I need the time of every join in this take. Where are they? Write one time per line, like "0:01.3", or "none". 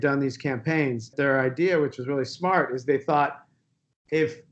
0:01.1